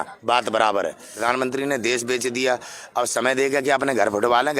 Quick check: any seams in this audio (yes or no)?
yes